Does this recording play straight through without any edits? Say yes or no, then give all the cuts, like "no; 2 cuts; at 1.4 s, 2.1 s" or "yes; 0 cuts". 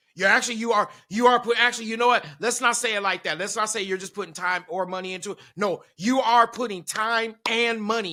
yes; 0 cuts